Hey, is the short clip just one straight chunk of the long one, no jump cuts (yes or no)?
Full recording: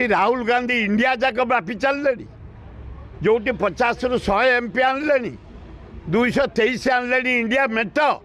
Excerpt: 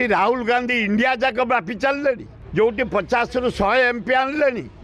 no